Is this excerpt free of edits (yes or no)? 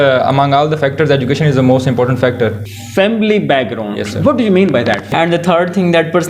no